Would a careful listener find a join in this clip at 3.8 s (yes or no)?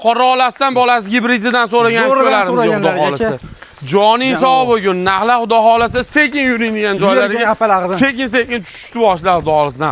no